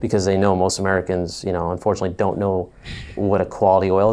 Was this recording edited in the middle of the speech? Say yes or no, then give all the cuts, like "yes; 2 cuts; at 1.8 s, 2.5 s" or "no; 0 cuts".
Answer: no; 0 cuts